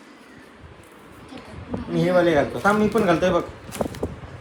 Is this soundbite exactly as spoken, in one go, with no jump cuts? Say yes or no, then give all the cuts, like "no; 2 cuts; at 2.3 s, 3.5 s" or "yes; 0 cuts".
yes; 0 cuts